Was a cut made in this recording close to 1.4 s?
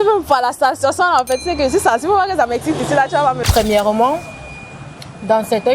no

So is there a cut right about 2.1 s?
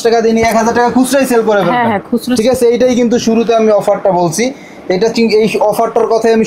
no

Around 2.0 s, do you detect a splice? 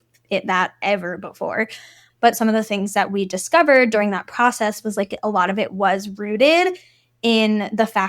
yes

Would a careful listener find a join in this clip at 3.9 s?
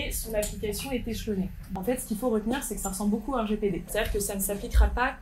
yes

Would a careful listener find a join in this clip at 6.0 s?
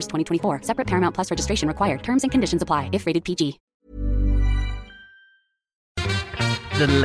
yes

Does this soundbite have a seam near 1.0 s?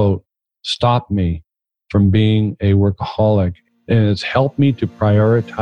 no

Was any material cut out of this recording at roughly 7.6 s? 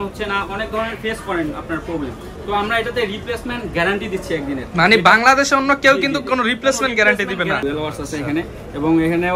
yes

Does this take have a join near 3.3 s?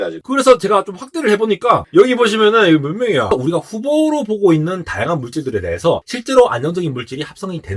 yes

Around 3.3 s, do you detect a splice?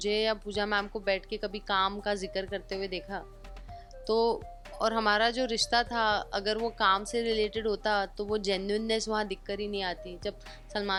no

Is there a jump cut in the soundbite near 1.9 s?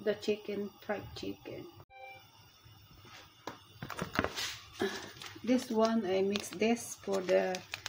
yes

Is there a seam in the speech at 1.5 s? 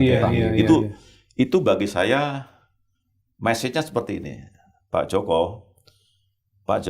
no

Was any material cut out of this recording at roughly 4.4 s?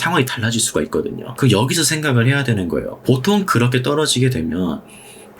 no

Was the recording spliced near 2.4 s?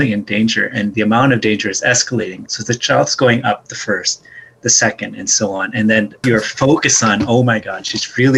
yes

